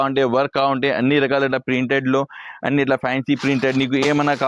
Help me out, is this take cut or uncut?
uncut